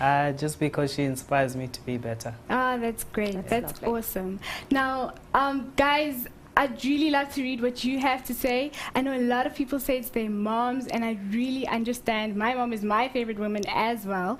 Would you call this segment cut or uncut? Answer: cut